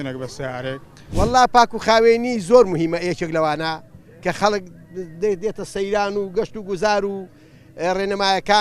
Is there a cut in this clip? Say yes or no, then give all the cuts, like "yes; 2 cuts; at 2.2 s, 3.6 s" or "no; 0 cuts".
yes; 1 cut; at 1.1 s